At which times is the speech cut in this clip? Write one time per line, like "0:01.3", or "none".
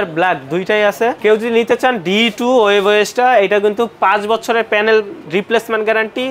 0:01.2